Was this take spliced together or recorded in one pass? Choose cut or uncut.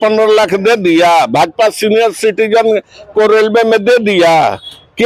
uncut